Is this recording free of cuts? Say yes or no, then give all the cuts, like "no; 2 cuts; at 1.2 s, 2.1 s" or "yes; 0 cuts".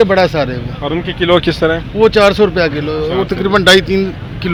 yes; 0 cuts